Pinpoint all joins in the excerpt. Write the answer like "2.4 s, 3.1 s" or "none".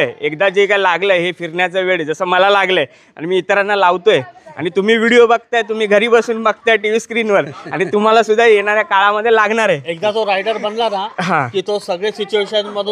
none